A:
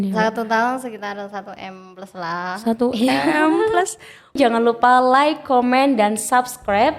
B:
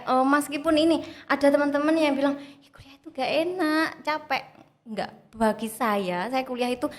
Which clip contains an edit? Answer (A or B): A